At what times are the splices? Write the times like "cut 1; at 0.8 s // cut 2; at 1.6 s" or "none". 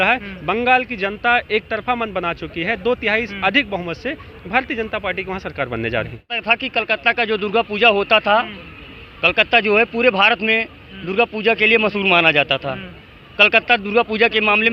cut 1; at 6.4 s